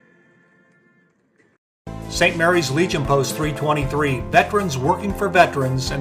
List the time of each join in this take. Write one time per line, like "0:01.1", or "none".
0:01.7